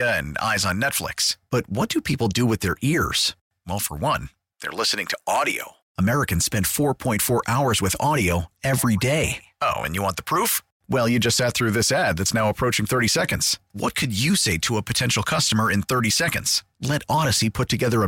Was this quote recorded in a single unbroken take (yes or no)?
yes